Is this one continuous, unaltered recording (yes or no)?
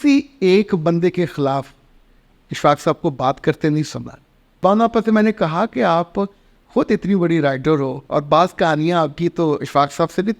no